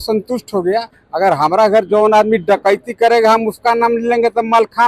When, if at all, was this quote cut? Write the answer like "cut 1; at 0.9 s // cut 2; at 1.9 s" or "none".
cut 1; at 1.0 s